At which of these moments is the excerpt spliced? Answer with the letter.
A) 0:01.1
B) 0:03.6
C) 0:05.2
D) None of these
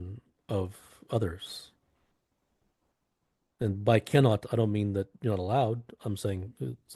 D